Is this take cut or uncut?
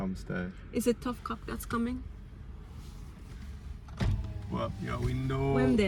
uncut